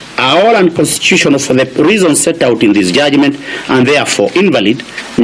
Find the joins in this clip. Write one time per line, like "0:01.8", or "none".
none